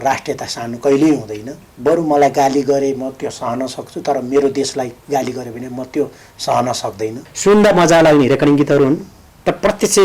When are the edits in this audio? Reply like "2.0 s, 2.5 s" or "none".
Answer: 1.7 s, 7.3 s